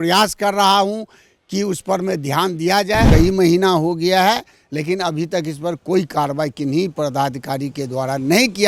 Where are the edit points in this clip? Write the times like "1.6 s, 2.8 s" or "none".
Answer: 3.1 s